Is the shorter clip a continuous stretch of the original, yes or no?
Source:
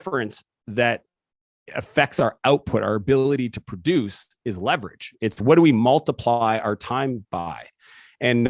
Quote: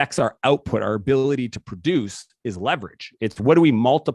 yes